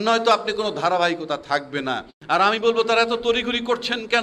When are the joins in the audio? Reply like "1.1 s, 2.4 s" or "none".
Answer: 2.1 s